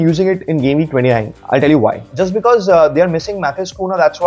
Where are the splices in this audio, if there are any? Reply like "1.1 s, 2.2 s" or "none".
2.1 s